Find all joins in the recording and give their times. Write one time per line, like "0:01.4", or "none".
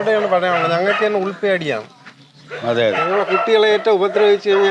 none